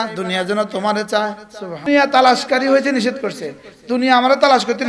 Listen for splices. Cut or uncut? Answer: cut